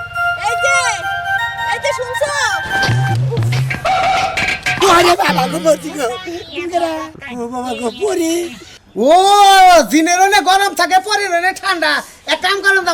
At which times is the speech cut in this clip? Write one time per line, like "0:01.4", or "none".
0:09.0

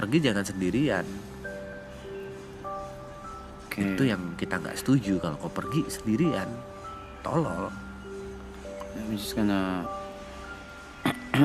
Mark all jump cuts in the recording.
none

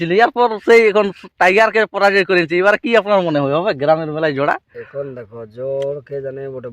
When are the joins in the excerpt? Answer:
none

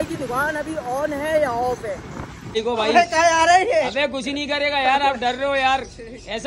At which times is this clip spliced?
0:02.6

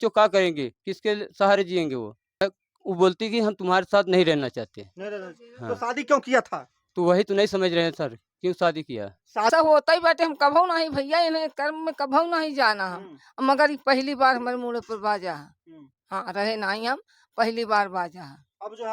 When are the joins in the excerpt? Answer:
0:02.4
0:09.5

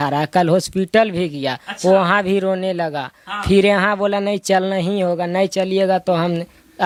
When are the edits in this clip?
none

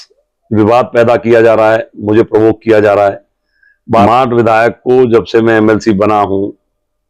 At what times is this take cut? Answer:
0:04.0

